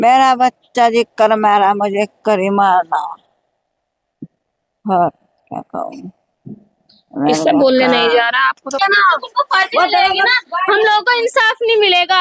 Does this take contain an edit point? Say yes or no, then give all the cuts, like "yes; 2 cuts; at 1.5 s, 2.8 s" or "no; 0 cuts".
yes; 1 cut; at 8.7 s